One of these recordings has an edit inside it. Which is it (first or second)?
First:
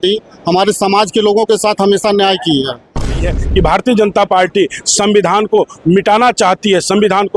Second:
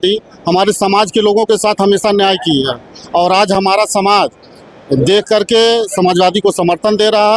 first